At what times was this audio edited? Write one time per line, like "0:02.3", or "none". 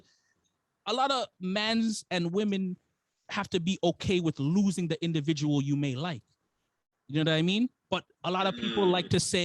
none